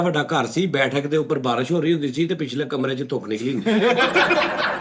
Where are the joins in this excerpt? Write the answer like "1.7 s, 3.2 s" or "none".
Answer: none